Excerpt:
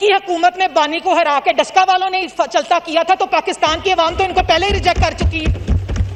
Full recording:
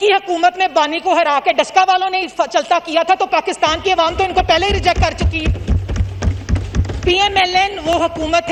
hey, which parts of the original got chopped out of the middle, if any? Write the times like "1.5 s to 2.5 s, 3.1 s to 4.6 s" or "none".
none